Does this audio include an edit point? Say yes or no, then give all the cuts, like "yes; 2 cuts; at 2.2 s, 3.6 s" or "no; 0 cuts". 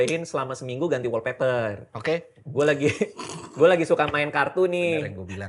no; 0 cuts